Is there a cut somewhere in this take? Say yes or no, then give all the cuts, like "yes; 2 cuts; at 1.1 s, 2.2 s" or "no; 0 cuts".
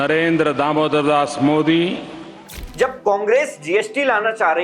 yes; 1 cut; at 2.6 s